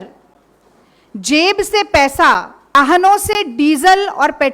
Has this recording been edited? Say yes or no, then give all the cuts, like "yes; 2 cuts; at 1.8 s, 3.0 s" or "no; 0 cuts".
yes; 1 cut; at 2.8 s